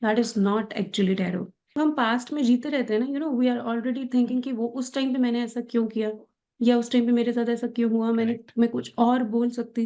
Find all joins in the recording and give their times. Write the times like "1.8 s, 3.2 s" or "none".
1.6 s